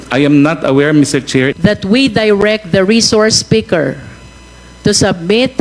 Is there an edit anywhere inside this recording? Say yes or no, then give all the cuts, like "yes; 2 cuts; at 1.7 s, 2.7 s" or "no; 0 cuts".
yes; 1 cut; at 1.5 s